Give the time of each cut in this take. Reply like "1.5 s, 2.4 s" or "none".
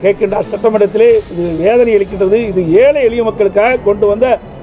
none